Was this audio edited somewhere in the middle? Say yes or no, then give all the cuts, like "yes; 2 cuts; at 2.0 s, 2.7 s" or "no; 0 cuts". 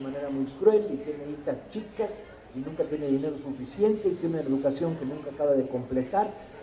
no; 0 cuts